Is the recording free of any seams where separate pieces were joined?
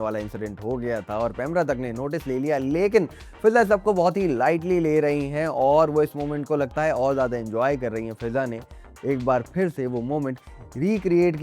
yes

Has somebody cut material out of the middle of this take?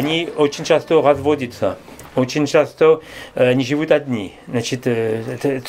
no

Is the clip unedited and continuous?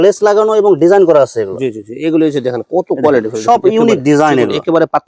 yes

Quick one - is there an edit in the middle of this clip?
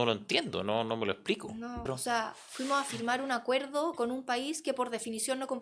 yes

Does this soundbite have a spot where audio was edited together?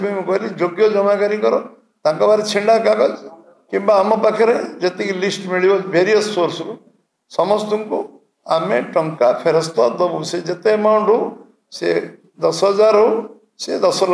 no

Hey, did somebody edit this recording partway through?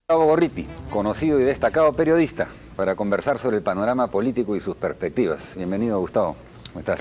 no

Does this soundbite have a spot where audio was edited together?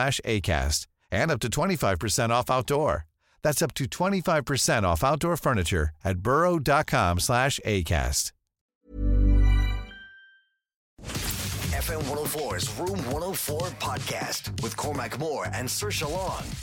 yes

